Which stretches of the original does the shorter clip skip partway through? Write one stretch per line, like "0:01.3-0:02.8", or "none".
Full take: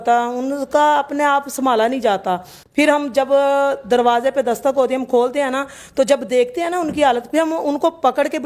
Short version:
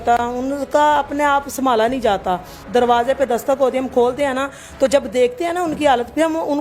0:02.6-0:03.8

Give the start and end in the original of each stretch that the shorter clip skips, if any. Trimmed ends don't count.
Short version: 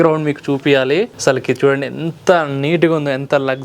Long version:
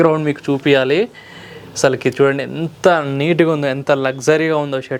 0:01.1-0:01.7

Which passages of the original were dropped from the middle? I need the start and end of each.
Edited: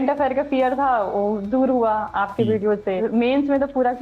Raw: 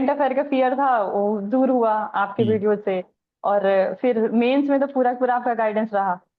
0:03.0-0:04.2

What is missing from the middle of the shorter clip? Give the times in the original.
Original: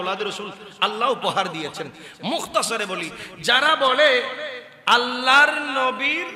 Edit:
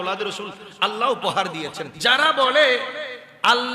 0:01.8-0:03.3

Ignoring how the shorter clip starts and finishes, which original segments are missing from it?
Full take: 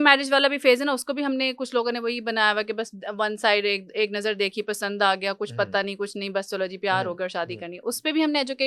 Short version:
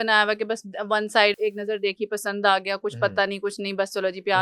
0:03.6-0:03.9

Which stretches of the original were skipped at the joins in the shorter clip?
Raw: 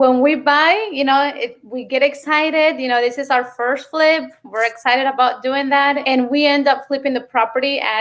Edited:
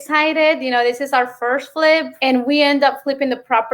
0:04.3-0:06.0

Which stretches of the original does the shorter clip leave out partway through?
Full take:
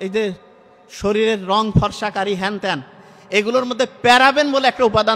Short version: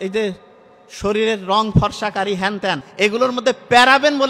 0:02.9-0:03.2

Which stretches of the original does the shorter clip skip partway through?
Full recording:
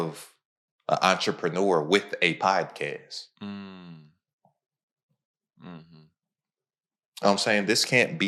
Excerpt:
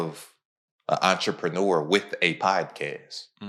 none

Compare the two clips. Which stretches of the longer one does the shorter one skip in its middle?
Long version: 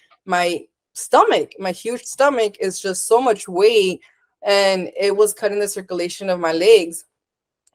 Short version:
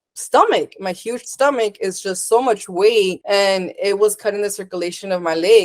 0:04.0-0:04.4

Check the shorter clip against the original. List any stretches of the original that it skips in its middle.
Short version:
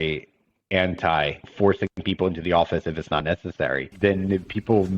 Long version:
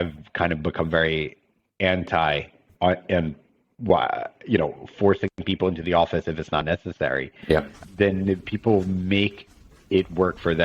0:02.5-0:04.8
0:07.3-0:07.8

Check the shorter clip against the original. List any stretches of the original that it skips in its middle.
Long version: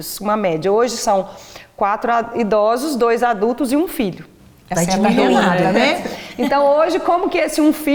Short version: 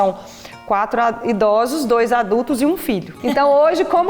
0:04.2-0:06.3

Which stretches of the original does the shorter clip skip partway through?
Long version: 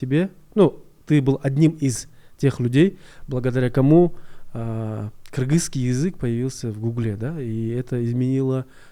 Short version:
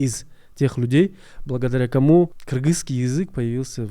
0:04.2-0:05.3

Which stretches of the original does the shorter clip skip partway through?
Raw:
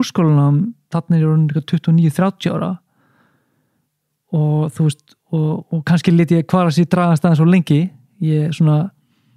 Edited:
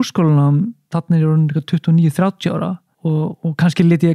0:02.9-0:05.1

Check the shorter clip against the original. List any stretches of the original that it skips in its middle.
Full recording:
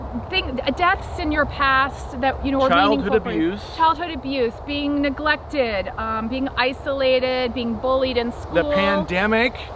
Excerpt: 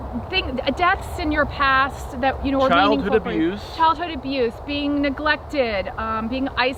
none

